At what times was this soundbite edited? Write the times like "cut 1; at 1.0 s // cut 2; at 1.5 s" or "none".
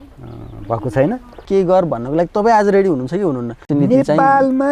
cut 1; at 1.4 s // cut 2; at 3.6 s